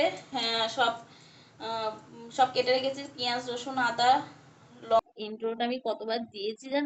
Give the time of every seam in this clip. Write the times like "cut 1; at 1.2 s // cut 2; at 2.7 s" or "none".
cut 1; at 5.0 s